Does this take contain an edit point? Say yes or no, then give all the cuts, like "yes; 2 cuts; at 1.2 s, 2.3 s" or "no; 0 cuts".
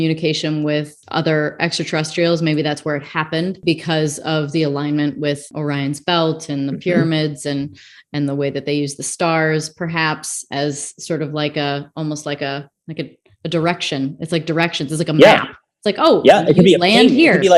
yes; 3 cuts; at 1.0 s, 3.5 s, 5.5 s